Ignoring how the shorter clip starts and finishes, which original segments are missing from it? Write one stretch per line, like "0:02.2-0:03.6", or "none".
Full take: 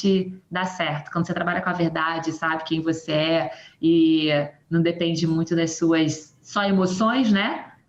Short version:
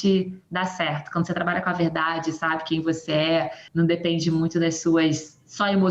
0:03.6-0:04.6